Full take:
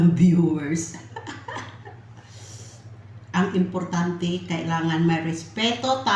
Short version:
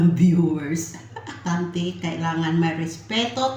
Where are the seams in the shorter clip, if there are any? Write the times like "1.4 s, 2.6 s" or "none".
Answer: 1.4 s

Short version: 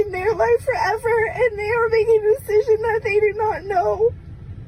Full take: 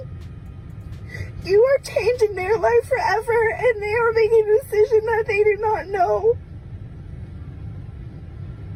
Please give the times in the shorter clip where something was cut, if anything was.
none

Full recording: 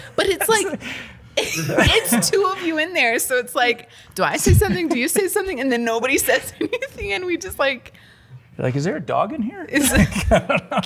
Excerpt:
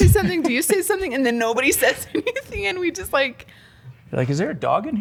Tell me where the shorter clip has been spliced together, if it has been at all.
none

